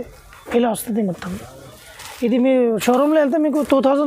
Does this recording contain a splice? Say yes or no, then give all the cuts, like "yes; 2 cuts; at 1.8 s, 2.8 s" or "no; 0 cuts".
no; 0 cuts